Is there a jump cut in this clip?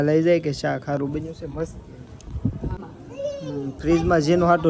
yes; 1 cut; at 2.8 s

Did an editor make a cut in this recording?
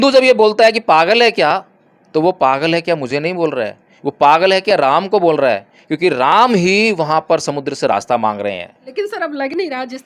no; 0 cuts

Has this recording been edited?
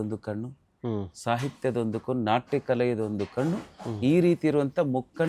no; 0 cuts

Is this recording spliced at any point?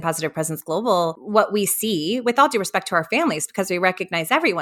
yes; 1 cut; at 1.2 s

